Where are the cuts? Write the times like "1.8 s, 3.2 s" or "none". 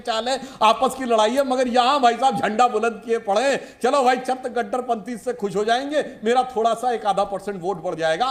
none